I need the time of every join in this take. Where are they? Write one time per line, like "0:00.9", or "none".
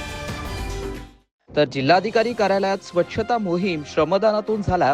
0:01.0